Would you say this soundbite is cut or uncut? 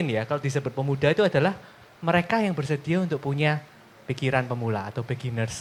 uncut